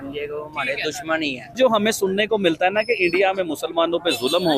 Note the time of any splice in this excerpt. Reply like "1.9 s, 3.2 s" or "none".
1.6 s